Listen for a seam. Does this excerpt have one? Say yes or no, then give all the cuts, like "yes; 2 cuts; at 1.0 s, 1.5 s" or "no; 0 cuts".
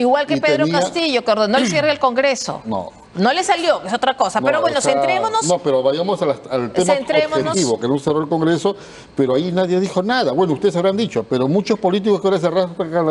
no; 0 cuts